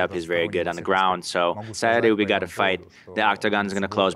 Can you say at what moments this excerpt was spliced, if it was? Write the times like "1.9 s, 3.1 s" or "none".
1.7 s